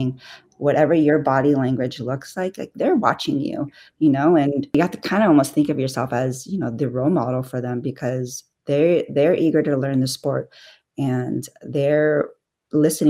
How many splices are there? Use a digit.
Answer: 0